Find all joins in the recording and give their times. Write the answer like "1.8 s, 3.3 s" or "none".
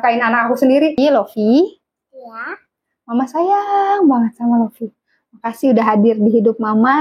1.0 s